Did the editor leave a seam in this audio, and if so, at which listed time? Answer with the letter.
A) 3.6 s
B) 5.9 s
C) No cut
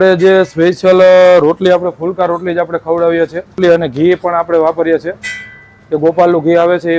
A